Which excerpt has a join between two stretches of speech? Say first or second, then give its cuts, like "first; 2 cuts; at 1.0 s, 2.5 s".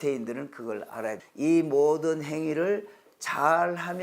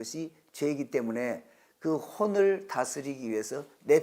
first; 1 cut; at 1.2 s